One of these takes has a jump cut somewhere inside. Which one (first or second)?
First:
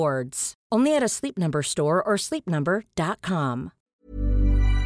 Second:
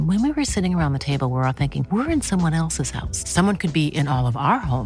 first